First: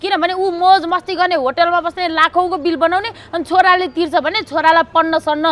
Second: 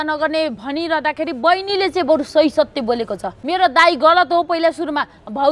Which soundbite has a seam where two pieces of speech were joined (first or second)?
second